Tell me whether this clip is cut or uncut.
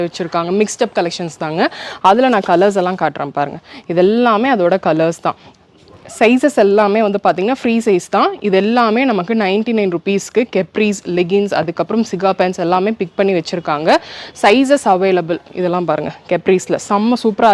uncut